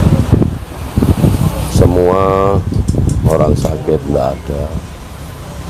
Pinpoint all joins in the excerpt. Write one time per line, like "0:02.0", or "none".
none